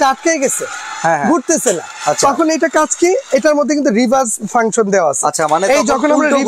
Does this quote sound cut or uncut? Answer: uncut